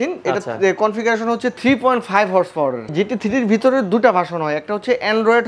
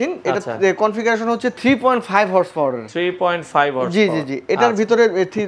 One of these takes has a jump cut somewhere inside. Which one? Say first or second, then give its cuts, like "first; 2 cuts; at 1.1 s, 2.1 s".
first; 1 cut; at 2.9 s